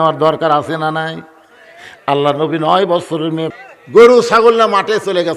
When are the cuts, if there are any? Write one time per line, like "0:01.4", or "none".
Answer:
0:03.5